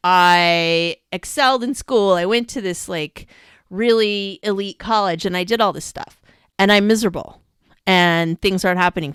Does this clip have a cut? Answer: no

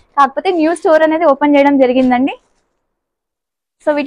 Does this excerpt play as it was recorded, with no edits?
yes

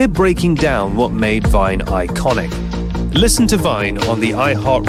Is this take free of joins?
yes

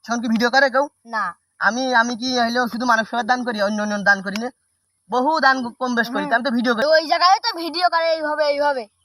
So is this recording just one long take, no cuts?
no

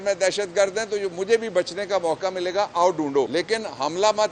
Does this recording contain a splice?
yes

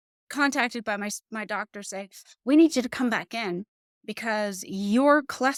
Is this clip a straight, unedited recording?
yes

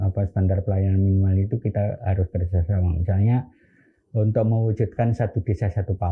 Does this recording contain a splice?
no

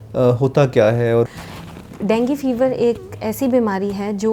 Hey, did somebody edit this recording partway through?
yes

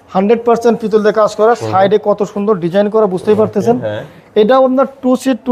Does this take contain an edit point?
no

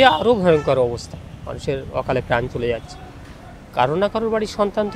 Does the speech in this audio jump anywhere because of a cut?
no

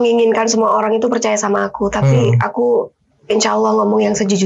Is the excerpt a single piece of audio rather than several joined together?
yes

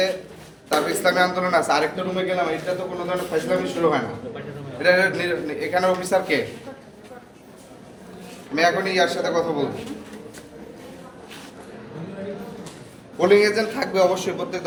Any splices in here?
no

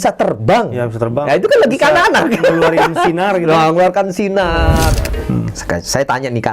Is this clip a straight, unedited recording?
no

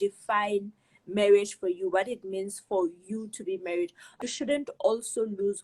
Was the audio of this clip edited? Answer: yes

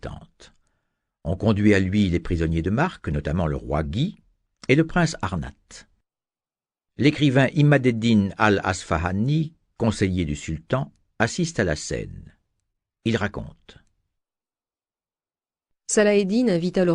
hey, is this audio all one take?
no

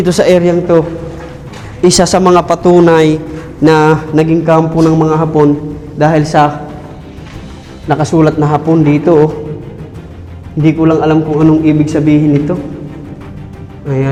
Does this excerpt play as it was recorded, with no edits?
yes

